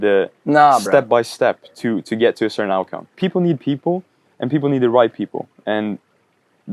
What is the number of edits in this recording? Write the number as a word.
one